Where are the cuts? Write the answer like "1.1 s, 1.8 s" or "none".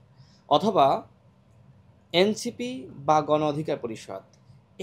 none

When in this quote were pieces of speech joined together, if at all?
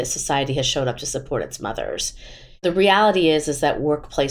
none

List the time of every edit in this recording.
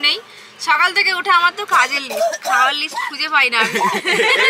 none

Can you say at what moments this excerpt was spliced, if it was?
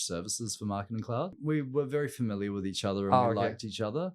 1.3 s

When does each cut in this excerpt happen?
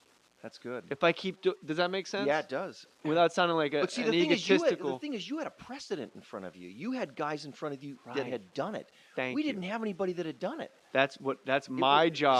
none

